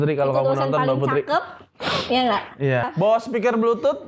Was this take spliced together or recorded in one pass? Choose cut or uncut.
cut